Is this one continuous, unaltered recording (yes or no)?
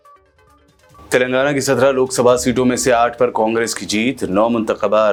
yes